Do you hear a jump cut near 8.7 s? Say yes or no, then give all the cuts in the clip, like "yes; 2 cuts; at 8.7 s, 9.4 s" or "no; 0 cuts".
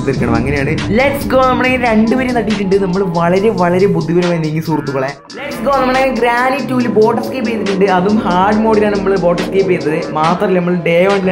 no; 2 cuts; at 3.0 s, 5.5 s